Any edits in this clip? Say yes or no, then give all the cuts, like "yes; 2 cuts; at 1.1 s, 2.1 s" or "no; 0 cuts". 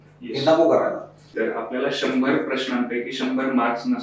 yes; 1 cut; at 1.3 s